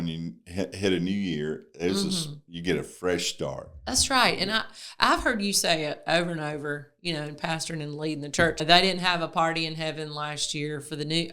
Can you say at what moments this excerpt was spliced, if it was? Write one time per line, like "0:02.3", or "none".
0:08.6